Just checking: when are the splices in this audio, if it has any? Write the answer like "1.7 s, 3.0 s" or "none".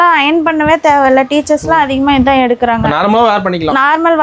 none